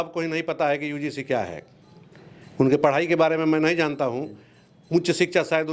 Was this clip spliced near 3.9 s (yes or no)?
no